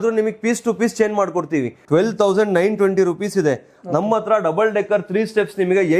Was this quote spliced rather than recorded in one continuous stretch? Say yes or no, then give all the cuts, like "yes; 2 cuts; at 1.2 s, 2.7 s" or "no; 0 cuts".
yes; 1 cut; at 1.8 s